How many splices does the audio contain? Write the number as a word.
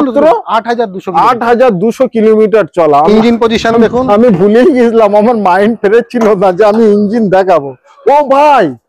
one